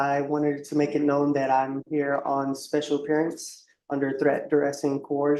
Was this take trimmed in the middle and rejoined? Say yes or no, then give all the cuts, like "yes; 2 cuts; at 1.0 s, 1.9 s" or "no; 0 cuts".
no; 0 cuts